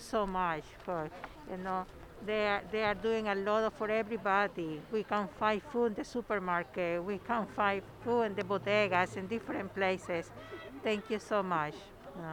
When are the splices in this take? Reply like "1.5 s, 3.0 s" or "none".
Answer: none